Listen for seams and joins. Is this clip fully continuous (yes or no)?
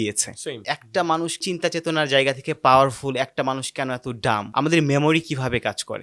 yes